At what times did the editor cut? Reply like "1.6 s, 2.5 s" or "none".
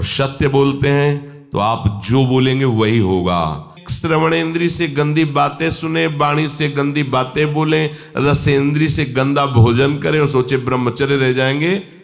3.8 s